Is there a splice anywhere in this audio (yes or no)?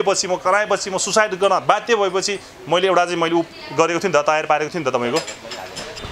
no